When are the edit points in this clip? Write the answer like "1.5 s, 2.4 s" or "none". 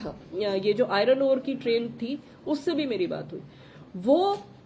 none

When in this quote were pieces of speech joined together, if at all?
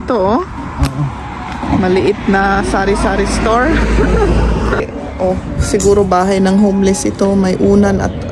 1.6 s, 4.8 s

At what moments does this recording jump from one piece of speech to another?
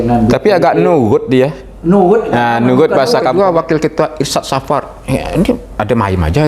3.3 s

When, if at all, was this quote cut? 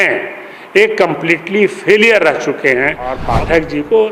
3.2 s

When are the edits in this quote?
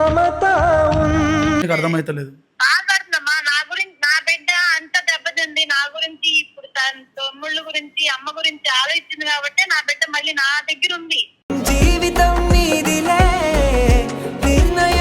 1.6 s

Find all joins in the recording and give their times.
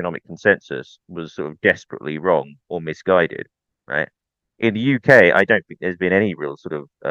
none

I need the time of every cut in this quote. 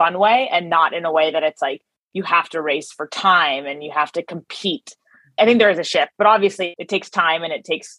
5.4 s, 6.8 s

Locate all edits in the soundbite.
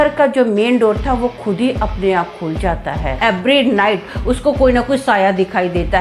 3.2 s

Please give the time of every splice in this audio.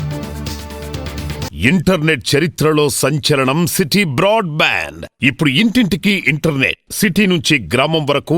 1.5 s

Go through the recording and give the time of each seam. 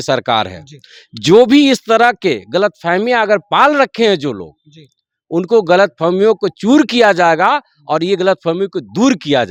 none

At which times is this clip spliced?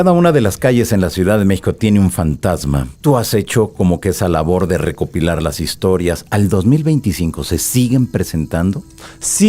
2.9 s

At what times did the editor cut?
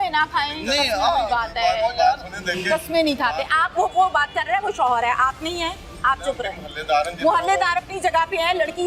none

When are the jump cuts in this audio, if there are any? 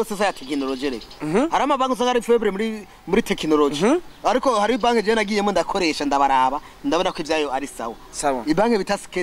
none

